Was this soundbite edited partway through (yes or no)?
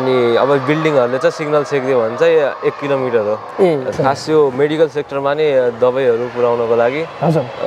yes